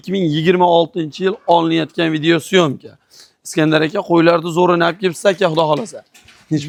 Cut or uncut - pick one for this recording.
uncut